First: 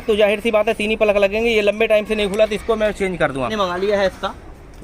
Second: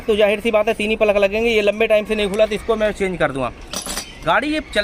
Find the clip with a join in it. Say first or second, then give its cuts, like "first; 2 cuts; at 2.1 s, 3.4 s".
first; 1 cut; at 3.5 s